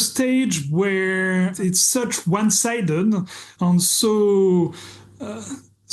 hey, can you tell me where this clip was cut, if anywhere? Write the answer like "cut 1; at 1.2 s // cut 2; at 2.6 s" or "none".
cut 1; at 1.6 s // cut 2; at 3.5 s